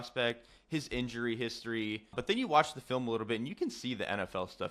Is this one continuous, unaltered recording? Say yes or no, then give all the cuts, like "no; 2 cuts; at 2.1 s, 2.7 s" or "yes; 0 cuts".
no; 1 cut; at 2.2 s